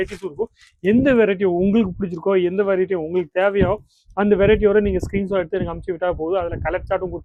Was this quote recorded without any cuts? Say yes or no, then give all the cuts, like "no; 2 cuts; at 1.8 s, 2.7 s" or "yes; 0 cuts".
yes; 0 cuts